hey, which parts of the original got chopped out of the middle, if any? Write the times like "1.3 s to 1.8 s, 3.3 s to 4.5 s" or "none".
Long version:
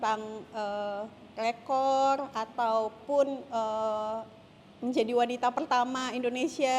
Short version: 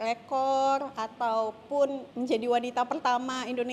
3.4 s to 4.7 s